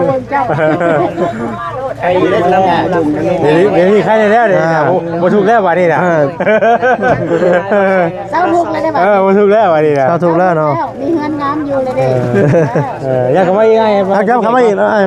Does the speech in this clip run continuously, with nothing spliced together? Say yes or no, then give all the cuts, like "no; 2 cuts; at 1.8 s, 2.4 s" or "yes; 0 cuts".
yes; 0 cuts